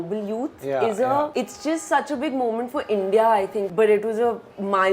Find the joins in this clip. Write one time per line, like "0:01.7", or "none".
0:01.3
0:03.7